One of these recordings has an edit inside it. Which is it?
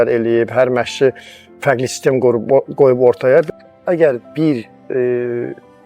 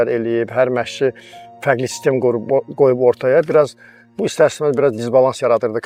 first; 1 cut; at 3.5 s

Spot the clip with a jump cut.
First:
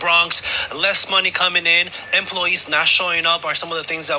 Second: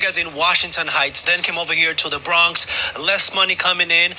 second; 1 cut; at 1.2 s

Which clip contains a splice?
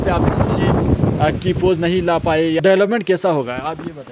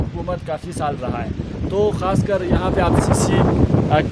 first; 1 cut; at 2.6 s

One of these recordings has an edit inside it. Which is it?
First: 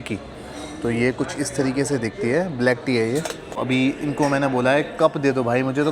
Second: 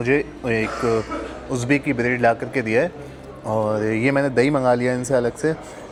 first; 1 cut; at 3.6 s

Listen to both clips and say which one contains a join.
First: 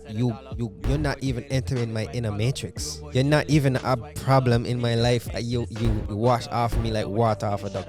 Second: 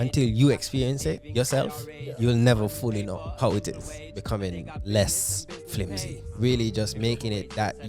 second; 2 cuts; at 4.0 s, 6.3 s

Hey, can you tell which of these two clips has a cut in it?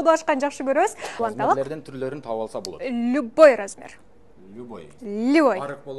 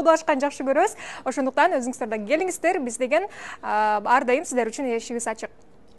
first; 1 cut; at 1.0 s

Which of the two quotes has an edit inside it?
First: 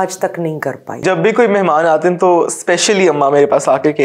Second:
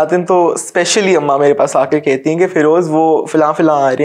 first; 1 cut; at 1.0 s

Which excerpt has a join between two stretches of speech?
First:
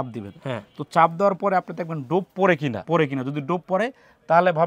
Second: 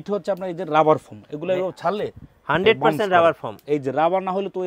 first; 1 cut; at 2.8 s

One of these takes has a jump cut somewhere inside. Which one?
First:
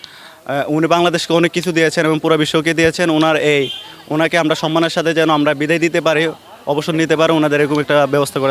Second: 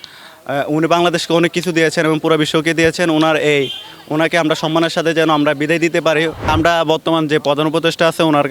second; 1 cut; at 6.5 s

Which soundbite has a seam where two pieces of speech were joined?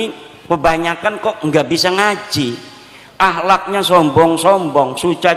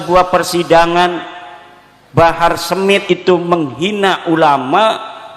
second; 1 cut; at 3.0 s

